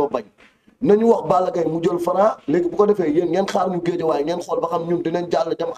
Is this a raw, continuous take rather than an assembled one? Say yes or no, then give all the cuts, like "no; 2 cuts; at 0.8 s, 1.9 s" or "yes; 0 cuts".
yes; 0 cuts